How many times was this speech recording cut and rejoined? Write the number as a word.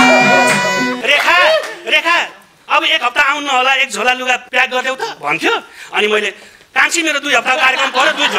two